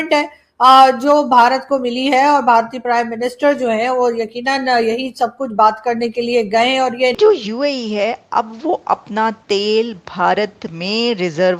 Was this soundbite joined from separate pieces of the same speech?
yes; 1 cut; at 7.2 s

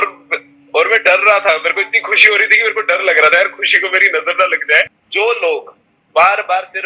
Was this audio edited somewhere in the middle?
yes; 1 cut; at 5.0 s

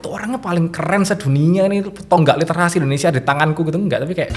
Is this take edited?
no; 0 cuts

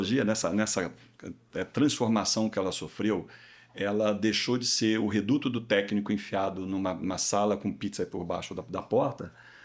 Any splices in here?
no; 0 cuts

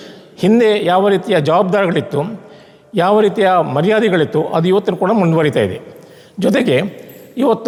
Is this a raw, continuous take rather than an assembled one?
yes; 0 cuts

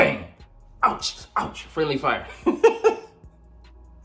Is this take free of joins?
yes; 0 cuts

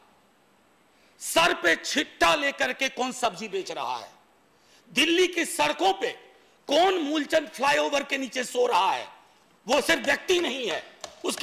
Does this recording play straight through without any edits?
yes; 0 cuts

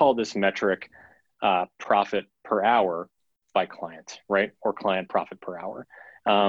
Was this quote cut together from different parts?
no; 0 cuts

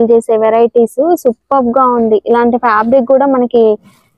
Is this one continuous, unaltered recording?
yes; 0 cuts

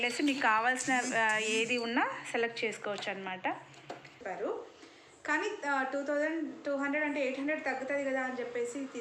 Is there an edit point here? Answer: yes; 1 cut; at 4.2 s

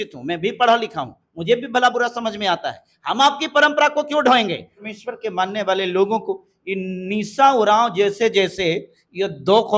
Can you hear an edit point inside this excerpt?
yes; 1 cut; at 4.8 s

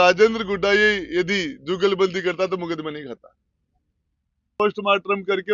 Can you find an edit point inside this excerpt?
yes; 1 cut; at 4.6 s

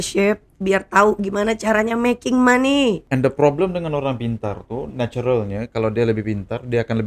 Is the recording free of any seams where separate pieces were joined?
no; 1 cut; at 3.0 s

